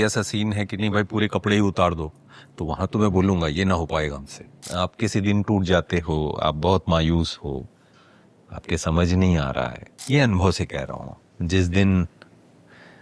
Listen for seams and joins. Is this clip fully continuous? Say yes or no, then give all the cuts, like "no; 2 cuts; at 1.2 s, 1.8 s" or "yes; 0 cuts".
no; 2 cuts; at 4.6 s, 9.9 s